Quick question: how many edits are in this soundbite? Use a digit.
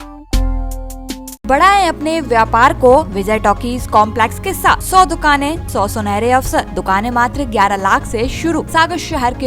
6